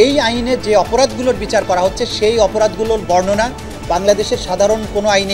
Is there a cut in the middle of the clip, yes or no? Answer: no